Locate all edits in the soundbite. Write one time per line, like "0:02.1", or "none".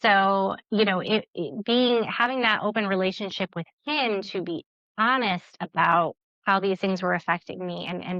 0:06.3